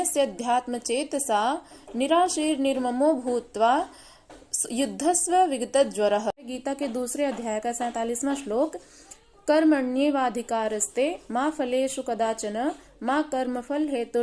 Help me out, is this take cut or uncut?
cut